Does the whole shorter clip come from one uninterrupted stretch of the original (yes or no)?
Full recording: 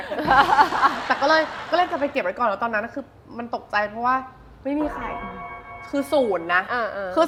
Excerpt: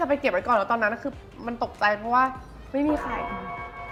yes